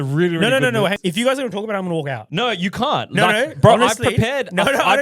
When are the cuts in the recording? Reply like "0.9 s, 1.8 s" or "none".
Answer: 1.0 s, 2.2 s